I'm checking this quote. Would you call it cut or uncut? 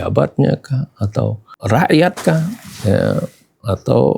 cut